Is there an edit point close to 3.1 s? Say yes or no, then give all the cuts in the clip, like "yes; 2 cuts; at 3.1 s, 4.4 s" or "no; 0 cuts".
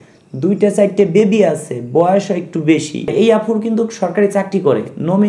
yes; 1 cut; at 3.1 s